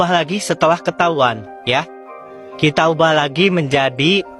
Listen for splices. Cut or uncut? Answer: uncut